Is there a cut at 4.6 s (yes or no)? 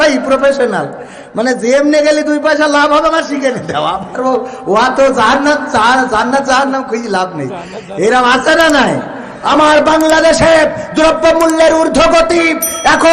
no